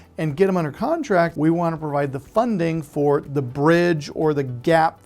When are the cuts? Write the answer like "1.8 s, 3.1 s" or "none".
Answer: 1.3 s

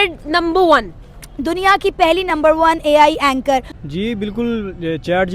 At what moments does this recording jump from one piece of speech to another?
none

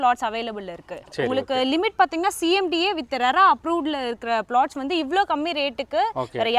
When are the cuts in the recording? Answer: none

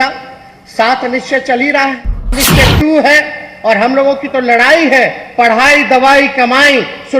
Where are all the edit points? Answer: 2.3 s

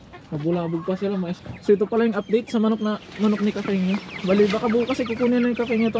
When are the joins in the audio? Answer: 1.4 s

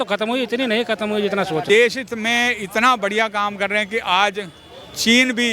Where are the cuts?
1.6 s

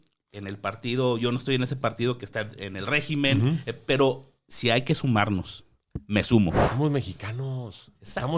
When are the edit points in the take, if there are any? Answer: 6.7 s

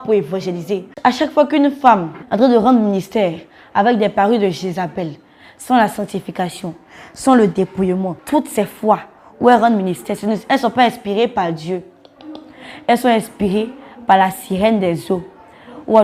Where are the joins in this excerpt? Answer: 0.9 s, 2.2 s, 8.2 s

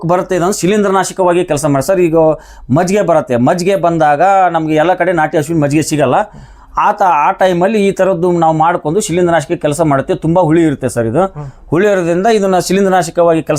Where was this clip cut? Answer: none

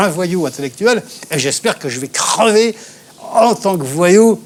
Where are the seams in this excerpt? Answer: none

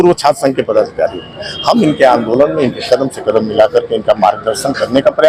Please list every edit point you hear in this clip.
none

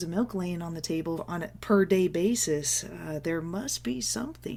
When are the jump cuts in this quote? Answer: none

